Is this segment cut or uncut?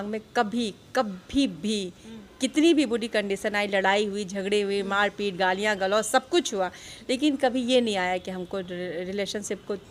uncut